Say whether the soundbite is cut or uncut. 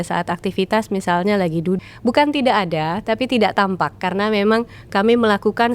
cut